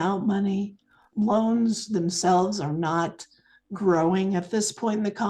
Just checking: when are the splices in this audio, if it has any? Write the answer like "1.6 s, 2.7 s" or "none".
1.0 s